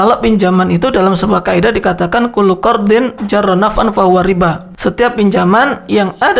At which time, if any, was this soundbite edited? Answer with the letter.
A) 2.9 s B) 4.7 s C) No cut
B